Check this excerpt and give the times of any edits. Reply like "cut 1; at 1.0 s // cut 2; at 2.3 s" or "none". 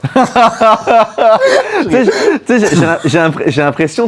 none